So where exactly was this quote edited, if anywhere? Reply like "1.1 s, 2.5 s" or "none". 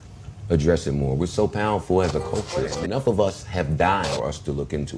2.8 s, 4.1 s